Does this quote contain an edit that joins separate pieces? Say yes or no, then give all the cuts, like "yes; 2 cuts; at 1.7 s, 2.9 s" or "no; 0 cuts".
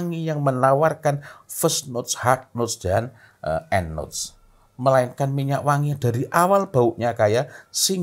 no; 0 cuts